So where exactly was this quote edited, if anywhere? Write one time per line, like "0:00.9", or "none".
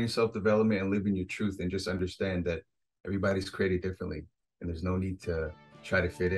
none